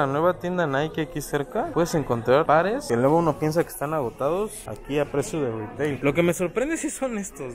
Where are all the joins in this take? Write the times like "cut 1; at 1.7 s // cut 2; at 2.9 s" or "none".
none